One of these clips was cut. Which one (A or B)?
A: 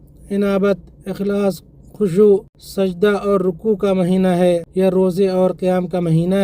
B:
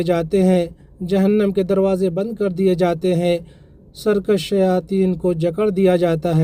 A